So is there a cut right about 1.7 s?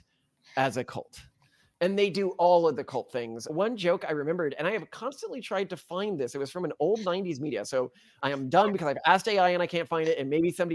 no; 0 cuts

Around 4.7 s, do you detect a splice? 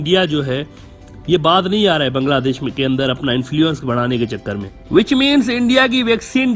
yes; 1 cut; at 4.7 s

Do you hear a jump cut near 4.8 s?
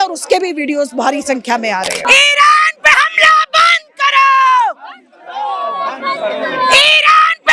no; 1 cut; at 2.0 s

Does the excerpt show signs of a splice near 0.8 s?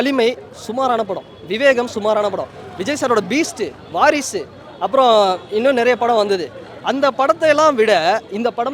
no; 0 cuts

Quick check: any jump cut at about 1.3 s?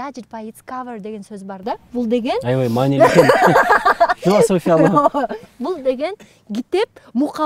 no; 0 cuts

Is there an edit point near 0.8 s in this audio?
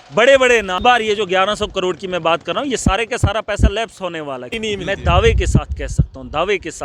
yes; 2 cuts; at 0.8 s, 4.5 s

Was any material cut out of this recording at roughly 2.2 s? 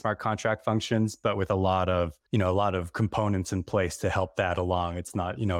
yes; 1 cut; at 2.2 s

